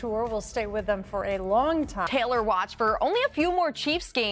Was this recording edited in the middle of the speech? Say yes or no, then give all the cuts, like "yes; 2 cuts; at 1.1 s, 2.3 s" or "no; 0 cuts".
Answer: yes; 1 cut; at 2.1 s